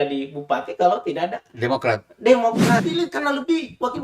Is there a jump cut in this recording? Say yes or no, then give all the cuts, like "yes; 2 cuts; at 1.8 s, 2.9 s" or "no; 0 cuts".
yes; 1 cut; at 2.9 s